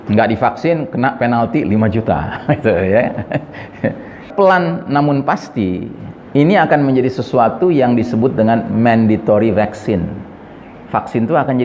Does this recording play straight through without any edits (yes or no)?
no